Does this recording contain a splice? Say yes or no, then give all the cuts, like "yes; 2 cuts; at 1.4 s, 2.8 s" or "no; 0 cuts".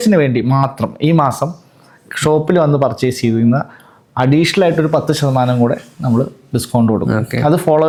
no; 0 cuts